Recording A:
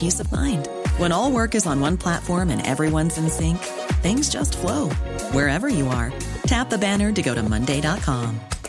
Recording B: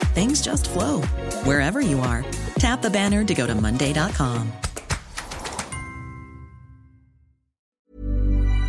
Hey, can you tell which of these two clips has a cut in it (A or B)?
B